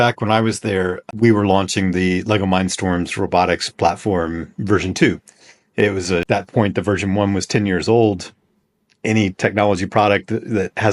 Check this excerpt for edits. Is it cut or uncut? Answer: cut